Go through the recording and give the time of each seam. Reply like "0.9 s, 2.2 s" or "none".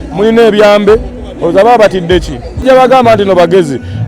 2.6 s

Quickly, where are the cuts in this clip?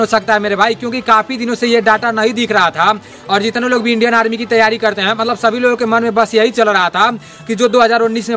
none

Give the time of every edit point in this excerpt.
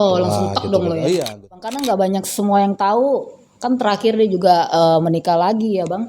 1.8 s

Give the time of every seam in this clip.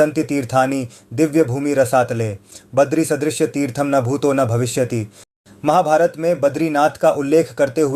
5.6 s

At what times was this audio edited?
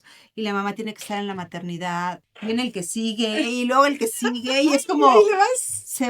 2.3 s

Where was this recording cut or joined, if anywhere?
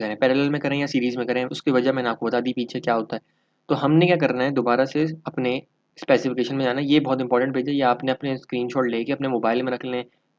none

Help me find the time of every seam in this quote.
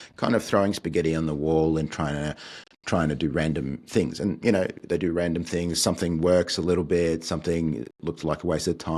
none

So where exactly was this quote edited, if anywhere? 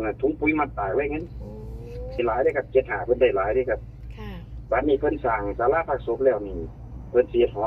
2.2 s

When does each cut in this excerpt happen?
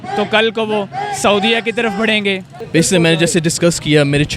2.5 s

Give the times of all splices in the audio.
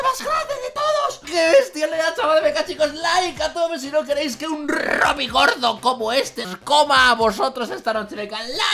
1.2 s, 6.5 s

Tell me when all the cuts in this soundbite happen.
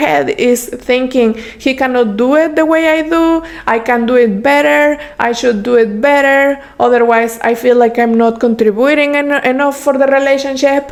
none

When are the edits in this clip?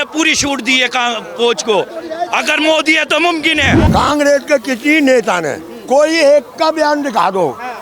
3.8 s

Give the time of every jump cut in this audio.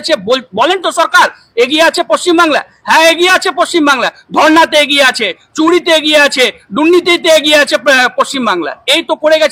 none

